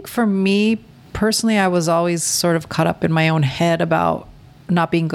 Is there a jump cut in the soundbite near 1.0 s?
yes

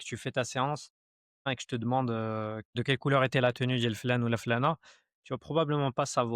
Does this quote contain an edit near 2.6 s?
yes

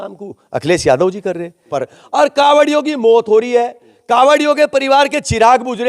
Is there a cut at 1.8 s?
yes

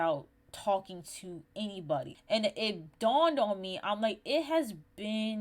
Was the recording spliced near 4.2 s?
no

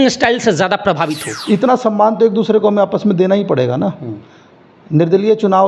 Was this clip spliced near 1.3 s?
yes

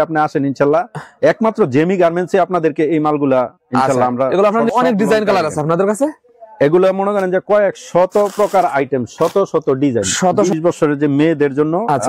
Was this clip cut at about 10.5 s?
yes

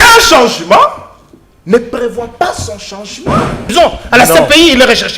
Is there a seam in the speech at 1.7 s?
no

